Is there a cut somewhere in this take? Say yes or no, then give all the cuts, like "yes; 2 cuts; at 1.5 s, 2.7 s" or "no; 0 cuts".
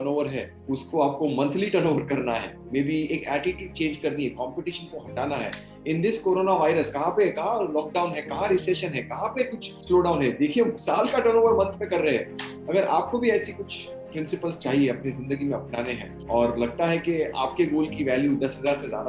no; 0 cuts